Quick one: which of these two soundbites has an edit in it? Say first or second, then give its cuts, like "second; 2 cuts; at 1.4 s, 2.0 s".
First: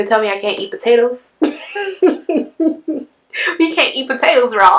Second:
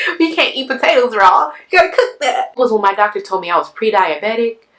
second; 1 cut; at 2.5 s